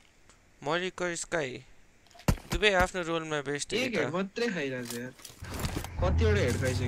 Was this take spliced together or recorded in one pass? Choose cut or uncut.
uncut